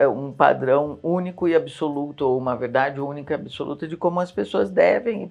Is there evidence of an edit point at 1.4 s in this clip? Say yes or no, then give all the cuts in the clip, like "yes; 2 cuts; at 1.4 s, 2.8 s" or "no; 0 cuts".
no; 0 cuts